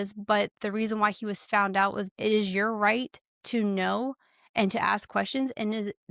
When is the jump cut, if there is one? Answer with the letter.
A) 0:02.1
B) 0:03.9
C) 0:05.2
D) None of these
A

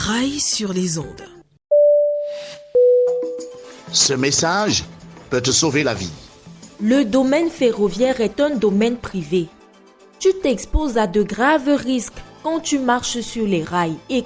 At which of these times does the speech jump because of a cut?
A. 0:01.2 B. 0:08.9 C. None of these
A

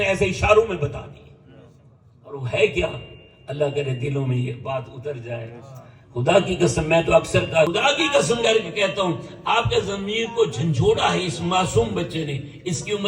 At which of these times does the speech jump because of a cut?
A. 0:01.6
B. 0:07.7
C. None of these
B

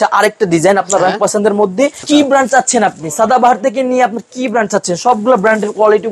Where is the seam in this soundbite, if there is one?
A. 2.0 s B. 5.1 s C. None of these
A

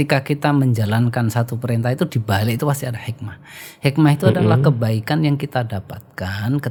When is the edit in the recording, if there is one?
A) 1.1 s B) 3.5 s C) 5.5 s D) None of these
D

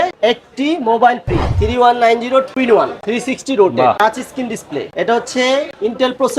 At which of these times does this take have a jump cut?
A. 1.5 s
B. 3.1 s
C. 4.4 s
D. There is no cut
A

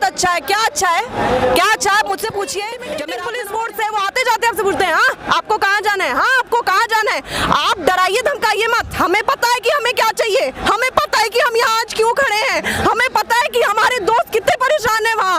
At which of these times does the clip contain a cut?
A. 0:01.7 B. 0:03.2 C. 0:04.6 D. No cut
B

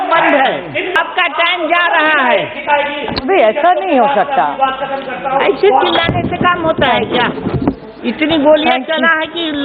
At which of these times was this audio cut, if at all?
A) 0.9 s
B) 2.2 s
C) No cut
A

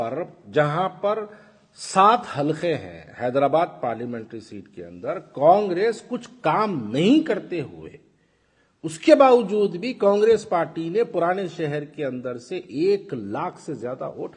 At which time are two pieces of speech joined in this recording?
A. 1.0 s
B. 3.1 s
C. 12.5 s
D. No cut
D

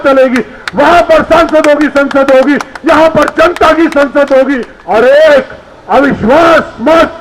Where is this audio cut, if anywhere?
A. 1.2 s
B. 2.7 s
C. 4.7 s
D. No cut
C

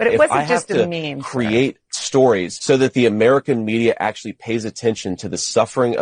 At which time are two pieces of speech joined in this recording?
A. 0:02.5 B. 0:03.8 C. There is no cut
A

